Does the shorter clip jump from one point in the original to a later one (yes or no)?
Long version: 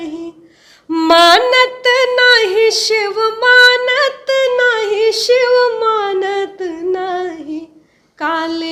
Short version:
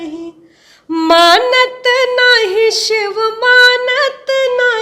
no